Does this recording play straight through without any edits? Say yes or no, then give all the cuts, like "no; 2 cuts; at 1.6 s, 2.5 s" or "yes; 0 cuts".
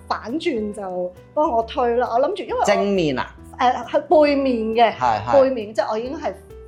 yes; 0 cuts